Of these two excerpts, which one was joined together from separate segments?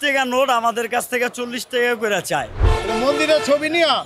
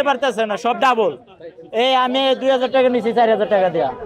first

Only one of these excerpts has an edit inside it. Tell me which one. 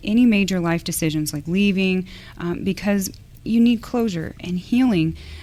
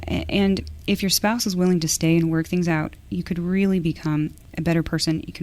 second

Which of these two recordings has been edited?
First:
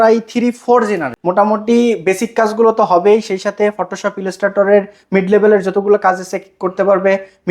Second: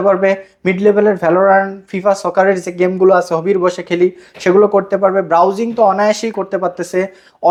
first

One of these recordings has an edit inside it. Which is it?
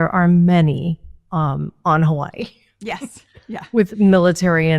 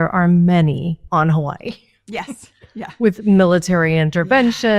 second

